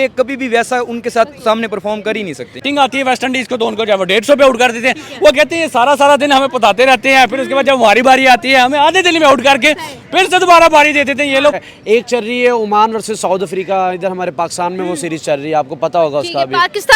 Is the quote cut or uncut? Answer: cut